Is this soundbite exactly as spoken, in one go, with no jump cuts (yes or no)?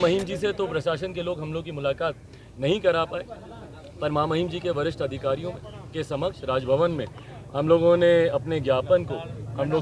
yes